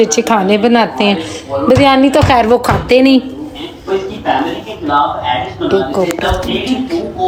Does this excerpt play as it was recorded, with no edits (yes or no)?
yes